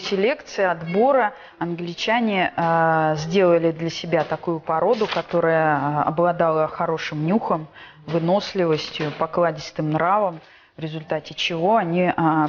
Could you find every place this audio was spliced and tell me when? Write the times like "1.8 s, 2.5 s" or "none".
4.0 s